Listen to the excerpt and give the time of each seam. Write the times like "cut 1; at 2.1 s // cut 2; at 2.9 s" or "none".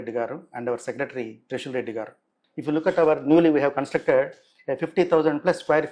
none